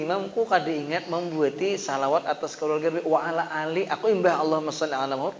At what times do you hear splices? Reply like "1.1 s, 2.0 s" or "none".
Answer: none